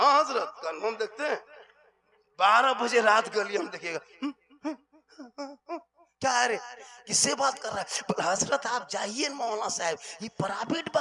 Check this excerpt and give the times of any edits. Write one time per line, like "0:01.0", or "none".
none